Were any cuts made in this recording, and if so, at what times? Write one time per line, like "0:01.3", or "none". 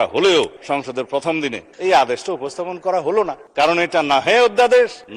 none